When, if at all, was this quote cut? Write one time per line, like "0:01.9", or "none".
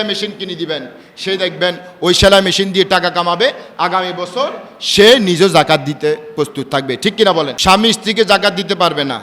0:07.5